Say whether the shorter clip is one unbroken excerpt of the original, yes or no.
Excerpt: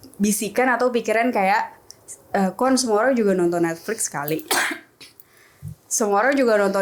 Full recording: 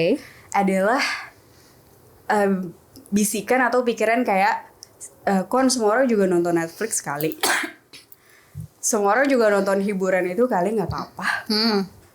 yes